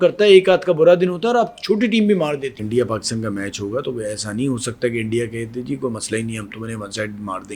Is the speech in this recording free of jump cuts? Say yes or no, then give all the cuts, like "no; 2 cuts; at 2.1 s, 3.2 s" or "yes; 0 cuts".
no; 1 cut; at 2.6 s